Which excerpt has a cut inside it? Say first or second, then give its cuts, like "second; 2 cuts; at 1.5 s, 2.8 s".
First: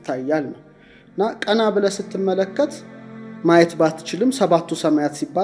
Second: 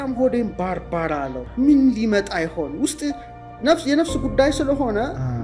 second; 1 cut; at 1.4 s